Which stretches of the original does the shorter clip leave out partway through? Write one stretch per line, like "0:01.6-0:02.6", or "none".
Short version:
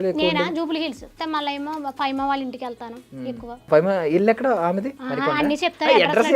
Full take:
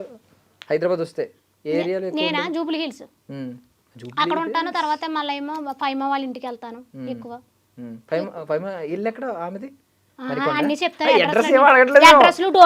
0:03.2-0:05.0
0:07.5-0:08.4
0:09.8-0:10.2